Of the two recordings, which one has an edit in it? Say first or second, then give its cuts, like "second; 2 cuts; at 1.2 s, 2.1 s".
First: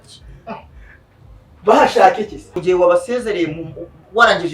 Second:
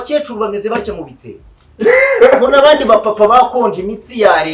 first; 1 cut; at 2.5 s